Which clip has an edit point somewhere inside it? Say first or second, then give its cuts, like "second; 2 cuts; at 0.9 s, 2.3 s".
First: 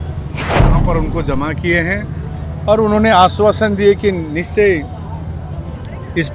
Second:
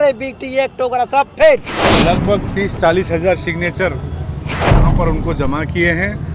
second; 1 cut; at 1.8 s